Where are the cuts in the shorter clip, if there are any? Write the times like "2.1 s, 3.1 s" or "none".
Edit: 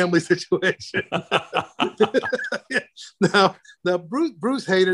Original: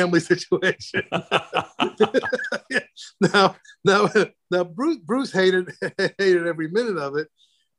3.7 s